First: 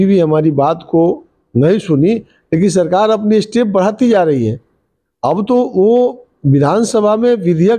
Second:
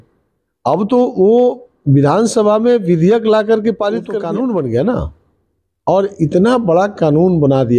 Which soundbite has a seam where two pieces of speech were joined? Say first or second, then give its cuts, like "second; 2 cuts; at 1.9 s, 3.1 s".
second; 1 cut; at 4.2 s